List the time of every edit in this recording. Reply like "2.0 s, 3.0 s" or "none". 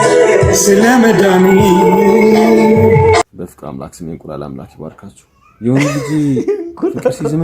3.3 s